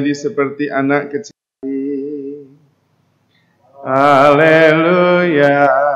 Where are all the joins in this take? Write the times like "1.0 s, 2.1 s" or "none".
1.5 s